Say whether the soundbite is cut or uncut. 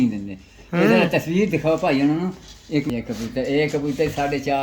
cut